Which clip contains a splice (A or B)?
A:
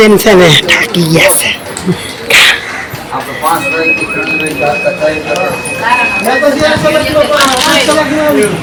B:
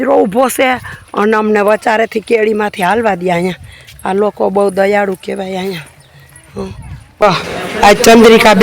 B